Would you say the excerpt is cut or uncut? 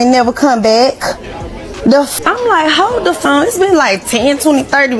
uncut